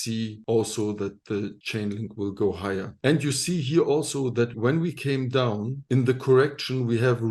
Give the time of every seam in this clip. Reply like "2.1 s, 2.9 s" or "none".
4.5 s